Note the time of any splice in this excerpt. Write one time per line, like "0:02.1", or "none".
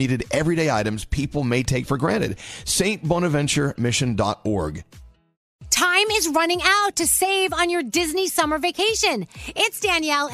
none

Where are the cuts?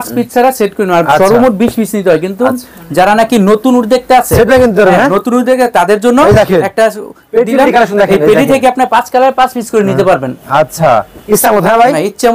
none

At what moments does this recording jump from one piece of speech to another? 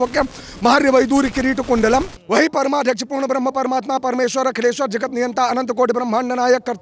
0:02.2

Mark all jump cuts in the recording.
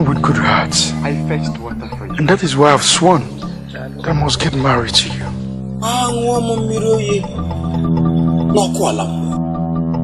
none

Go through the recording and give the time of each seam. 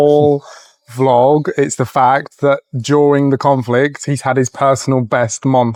none

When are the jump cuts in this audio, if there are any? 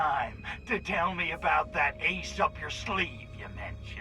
none

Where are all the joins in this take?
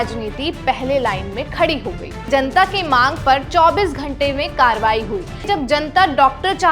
0:02.3
0:05.4

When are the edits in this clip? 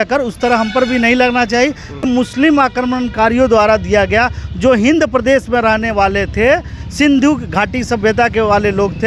0:02.0

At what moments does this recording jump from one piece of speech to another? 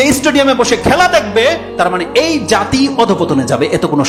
none

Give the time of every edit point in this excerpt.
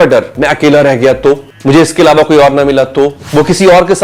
0:01.5
0:03.2

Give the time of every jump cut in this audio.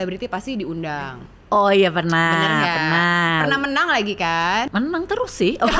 0:04.7

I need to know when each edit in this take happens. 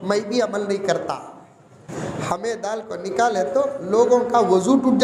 none

